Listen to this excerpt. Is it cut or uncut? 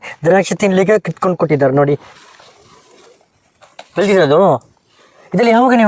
cut